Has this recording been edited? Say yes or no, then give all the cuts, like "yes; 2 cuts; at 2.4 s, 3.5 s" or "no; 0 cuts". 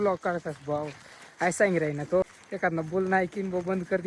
yes; 1 cut; at 2.4 s